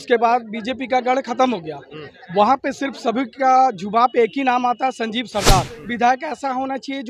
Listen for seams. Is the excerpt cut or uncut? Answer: cut